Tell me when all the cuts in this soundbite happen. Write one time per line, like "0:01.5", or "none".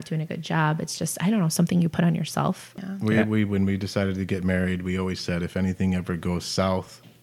0:02.7